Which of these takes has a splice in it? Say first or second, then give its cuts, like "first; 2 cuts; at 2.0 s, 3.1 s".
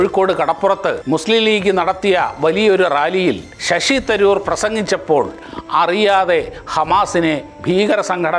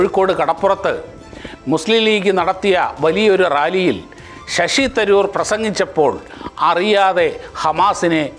first; 2 cuts; at 1.0 s, 3.5 s